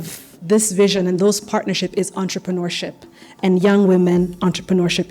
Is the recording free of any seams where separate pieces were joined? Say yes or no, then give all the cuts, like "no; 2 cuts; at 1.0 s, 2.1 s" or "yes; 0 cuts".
yes; 0 cuts